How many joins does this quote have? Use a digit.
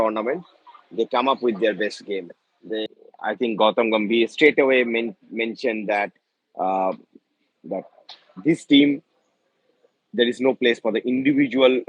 1